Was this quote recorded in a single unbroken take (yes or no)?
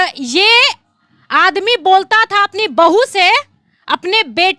yes